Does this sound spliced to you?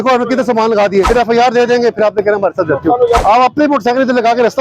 yes; 2 cuts; at 1.1 s, 3.2 s

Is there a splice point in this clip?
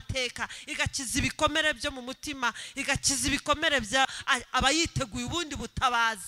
yes; 1 cut; at 4.1 s

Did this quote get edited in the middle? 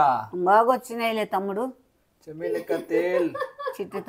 no; 0 cuts

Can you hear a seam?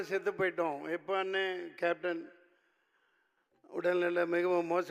no; 0 cuts

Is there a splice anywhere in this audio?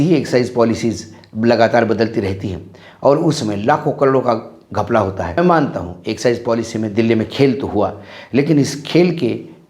yes; 1 cut; at 5.4 s

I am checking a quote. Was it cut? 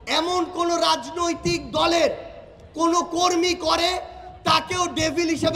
no; 0 cuts

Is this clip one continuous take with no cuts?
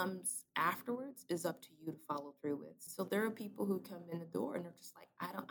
yes; 0 cuts

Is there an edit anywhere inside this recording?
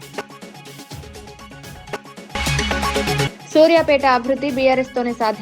yes; 1 cut; at 2.2 s

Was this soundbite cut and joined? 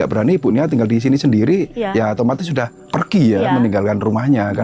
yes; 1 cut; at 2.8 s

